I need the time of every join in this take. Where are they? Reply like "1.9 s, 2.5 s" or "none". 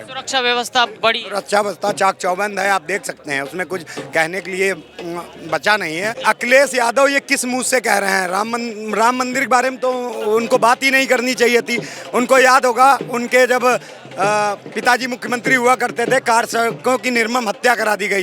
6.2 s